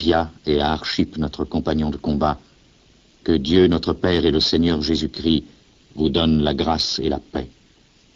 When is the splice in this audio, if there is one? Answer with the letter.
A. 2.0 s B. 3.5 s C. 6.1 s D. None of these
C